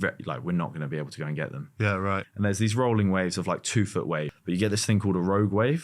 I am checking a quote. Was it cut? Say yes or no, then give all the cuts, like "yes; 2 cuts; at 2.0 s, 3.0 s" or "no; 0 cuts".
yes; 2 cuts; at 2.3 s, 4.3 s